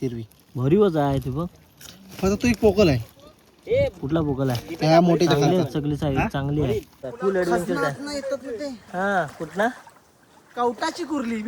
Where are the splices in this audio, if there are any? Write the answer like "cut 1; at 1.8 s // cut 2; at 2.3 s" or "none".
cut 1; at 7.0 s